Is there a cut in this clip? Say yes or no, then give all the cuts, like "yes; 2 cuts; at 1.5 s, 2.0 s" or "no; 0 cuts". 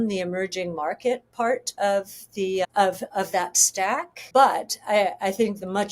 yes; 1 cut; at 4.1 s